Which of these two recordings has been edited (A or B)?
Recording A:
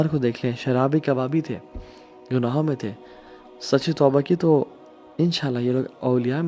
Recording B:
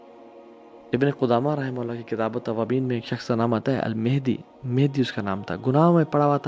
B